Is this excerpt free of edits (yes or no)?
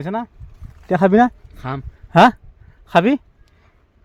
yes